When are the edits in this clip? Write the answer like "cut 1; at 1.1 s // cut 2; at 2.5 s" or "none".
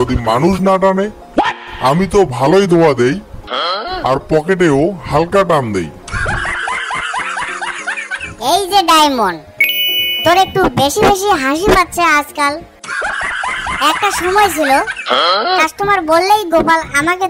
none